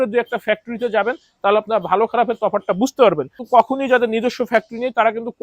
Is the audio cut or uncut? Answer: cut